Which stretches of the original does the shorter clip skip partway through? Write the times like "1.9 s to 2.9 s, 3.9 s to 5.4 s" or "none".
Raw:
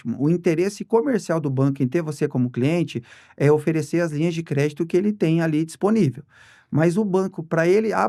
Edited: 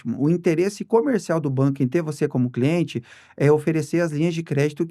none